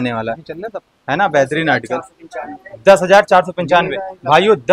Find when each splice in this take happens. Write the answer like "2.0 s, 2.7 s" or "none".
none